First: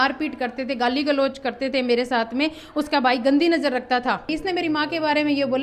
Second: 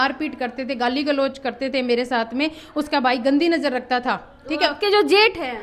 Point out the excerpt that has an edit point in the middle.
first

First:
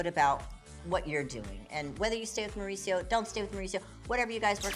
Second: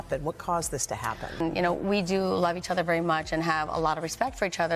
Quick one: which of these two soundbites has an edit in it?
second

